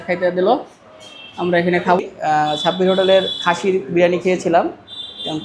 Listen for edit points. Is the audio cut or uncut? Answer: cut